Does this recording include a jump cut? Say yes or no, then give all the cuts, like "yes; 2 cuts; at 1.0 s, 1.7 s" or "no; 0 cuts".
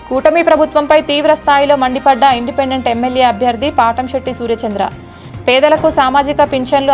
no; 0 cuts